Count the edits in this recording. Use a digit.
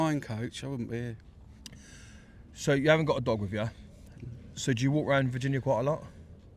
0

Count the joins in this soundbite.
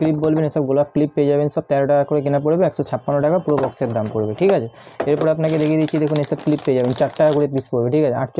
0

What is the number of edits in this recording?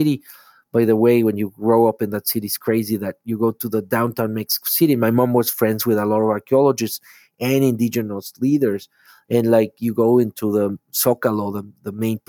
0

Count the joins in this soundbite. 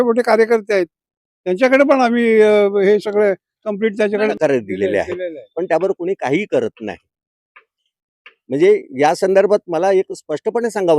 1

